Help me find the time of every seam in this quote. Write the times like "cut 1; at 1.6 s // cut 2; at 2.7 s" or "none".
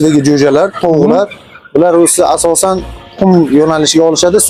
none